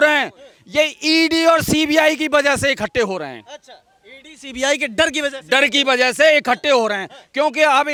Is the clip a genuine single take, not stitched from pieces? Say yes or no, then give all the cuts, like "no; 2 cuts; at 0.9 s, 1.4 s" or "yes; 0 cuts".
yes; 0 cuts